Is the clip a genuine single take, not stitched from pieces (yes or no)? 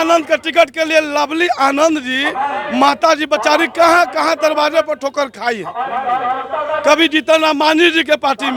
yes